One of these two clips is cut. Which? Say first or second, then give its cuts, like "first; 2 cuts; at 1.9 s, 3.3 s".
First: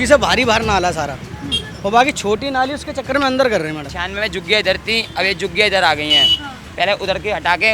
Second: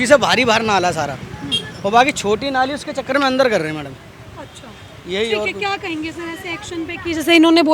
first; 1 cut; at 3.9 s